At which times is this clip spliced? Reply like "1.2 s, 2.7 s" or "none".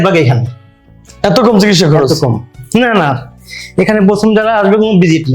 2.6 s